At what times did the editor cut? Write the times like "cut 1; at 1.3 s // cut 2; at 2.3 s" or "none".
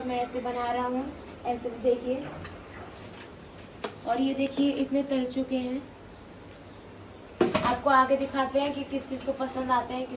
none